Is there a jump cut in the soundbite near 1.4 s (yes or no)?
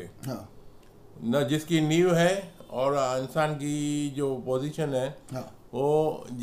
no